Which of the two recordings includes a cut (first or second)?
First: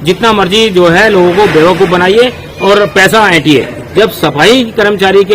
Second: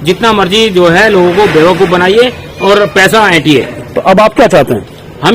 first